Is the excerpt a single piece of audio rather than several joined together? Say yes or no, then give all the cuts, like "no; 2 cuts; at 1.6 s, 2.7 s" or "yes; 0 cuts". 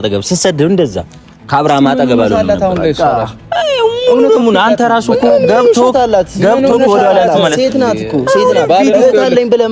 yes; 0 cuts